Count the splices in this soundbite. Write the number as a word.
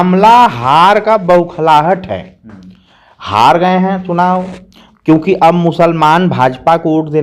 zero